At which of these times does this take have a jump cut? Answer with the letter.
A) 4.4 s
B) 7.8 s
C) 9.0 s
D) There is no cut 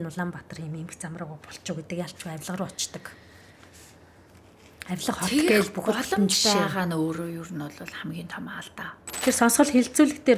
C